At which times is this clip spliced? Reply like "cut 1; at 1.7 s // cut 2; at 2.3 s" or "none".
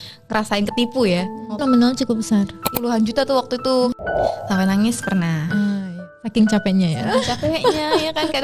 cut 1; at 1.6 s // cut 2; at 2.7 s // cut 3; at 3.9 s // cut 4; at 5.8 s